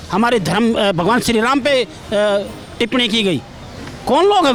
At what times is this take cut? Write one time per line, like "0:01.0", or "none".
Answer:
none